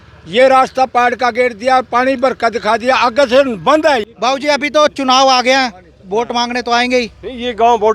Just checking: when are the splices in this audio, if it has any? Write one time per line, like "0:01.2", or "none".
0:04.5